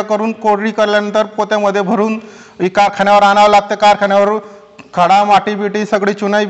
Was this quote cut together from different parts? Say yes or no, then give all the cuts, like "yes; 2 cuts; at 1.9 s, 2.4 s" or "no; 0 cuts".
no; 0 cuts